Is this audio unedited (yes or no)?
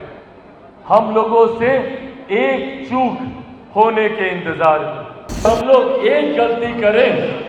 no